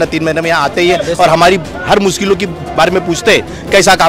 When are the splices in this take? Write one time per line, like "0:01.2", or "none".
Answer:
none